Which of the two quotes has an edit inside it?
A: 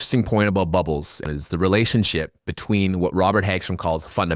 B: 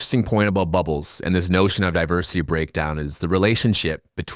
A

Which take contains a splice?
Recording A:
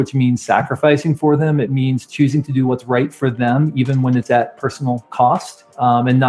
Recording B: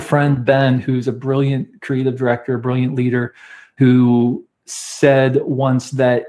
B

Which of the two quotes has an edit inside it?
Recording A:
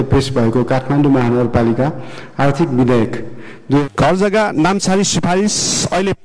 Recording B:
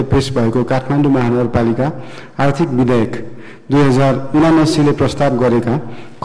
A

